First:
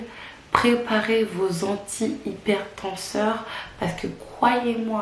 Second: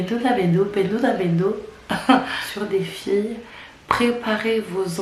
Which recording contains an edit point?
second; 1 cut; at 2.4 s

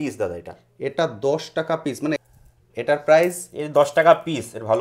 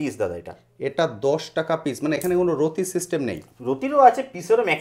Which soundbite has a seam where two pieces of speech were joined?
first; 1 cut; at 2.2 s

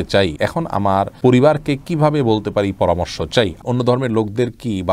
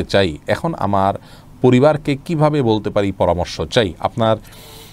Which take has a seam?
first; 2 cuts; at 0.8 s, 3.6 s

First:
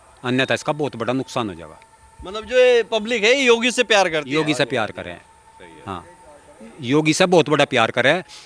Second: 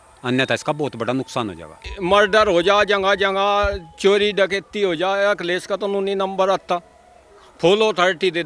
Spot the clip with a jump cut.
second; 1 cut; at 1.9 s

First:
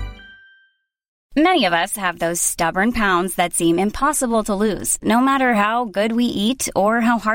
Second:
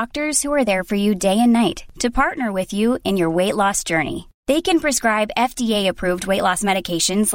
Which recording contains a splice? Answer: first; 1 cut; at 1.1 s

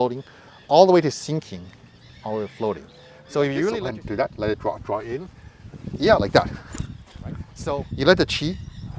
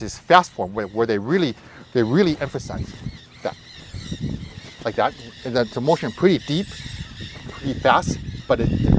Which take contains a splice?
first; 2 cuts; at 3.7 s, 7.5 s

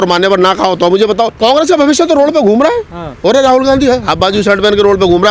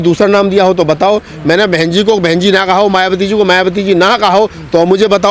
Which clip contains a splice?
first; 1 cut; at 1.3 s

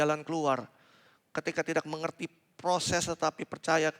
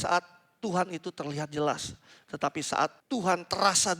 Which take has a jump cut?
second; 1 cut; at 3.0 s

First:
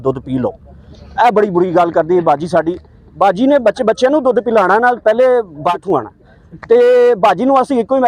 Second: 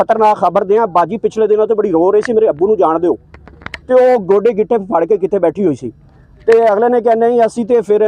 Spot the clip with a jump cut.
first; 1 cut; at 5.8 s

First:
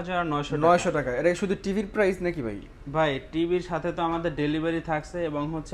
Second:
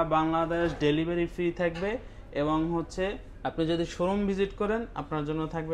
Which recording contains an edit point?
second; 1 cut; at 3.3 s

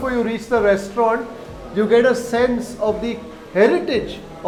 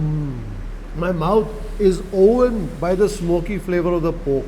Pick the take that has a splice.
second; 1 cut; at 2.7 s

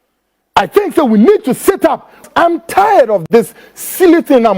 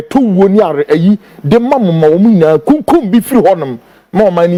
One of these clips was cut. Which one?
first; 1 cut; at 2.3 s

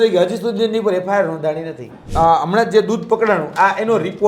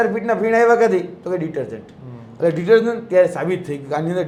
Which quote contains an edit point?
first; 1 cut; at 2.1 s

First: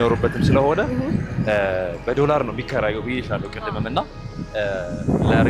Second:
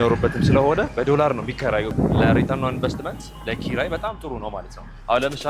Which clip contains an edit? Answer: second; 2 cuts; at 0.9 s, 1.9 s

